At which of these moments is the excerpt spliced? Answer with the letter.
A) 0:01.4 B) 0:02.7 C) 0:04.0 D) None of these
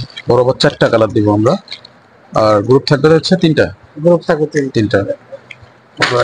D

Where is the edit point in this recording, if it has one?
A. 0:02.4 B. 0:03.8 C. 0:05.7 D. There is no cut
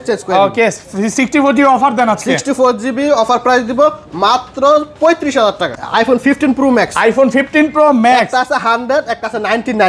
C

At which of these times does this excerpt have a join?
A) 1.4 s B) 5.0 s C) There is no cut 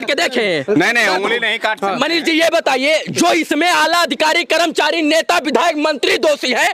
C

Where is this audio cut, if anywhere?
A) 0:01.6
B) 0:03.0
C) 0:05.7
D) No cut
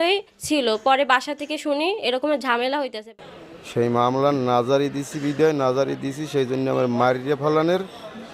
B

